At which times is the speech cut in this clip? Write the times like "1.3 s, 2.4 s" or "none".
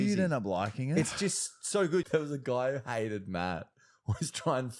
2.1 s